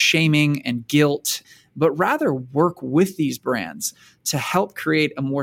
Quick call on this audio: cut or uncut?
cut